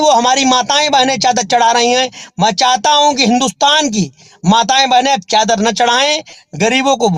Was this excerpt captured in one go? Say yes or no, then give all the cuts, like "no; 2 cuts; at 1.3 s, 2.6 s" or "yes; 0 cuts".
yes; 0 cuts